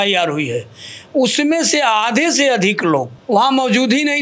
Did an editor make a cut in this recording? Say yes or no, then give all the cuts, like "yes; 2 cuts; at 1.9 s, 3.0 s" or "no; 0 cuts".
yes; 1 cut; at 3.2 s